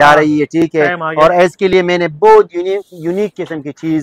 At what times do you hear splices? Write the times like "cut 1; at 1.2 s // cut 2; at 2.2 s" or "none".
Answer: none